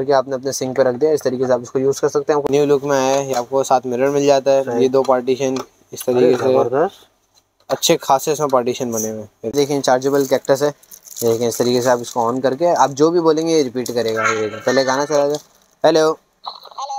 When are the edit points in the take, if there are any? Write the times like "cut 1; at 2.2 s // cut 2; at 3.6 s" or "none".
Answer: cut 1; at 2.4 s // cut 2; at 9.5 s